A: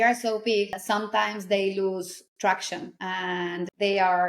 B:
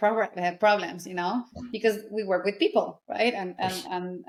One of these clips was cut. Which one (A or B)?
A